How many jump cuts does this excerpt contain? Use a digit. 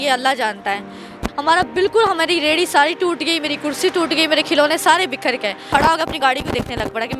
2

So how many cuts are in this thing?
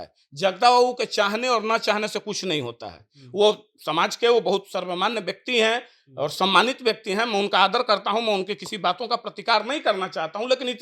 0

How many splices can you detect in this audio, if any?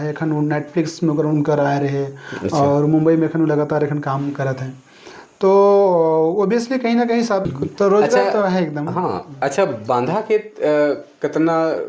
1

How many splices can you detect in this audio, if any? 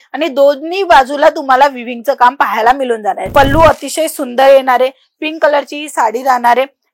1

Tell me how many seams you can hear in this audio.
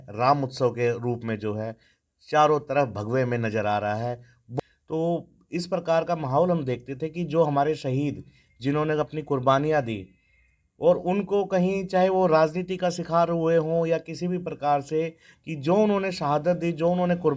1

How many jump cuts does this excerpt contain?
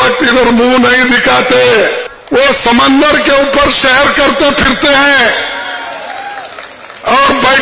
1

